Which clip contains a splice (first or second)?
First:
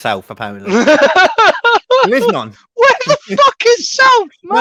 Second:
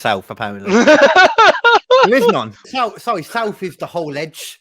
second